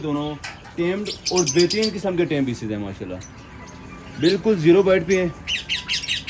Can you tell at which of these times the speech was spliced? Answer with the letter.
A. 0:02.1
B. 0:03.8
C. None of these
C